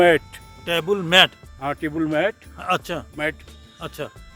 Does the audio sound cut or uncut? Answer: uncut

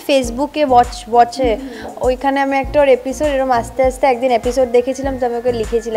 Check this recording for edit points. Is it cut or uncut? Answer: uncut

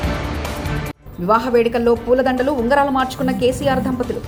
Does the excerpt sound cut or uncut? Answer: uncut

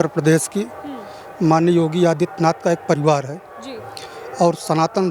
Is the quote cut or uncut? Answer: uncut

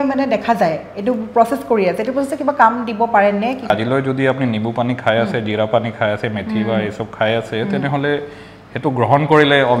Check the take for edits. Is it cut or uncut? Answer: cut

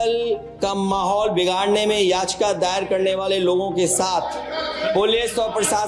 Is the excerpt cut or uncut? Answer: uncut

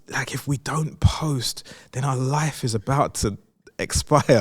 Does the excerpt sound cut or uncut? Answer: uncut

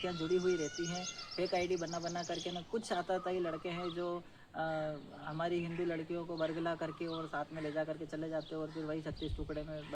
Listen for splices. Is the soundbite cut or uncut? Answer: uncut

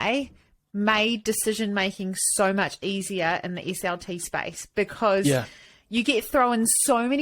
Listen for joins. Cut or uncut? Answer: uncut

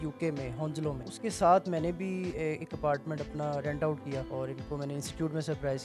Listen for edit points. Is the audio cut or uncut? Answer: cut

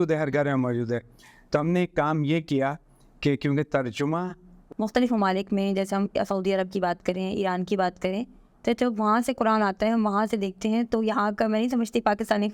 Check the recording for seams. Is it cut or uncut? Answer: cut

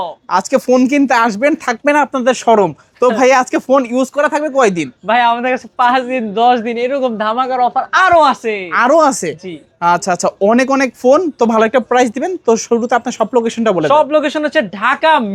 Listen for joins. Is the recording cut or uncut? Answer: uncut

